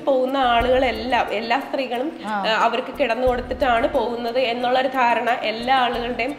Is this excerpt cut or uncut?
uncut